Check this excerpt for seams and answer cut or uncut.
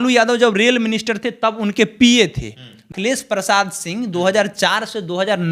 cut